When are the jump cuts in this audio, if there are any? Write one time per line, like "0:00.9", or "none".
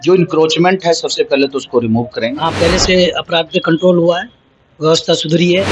0:02.4